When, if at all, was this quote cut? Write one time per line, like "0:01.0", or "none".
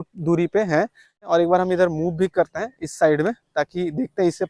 0:01.2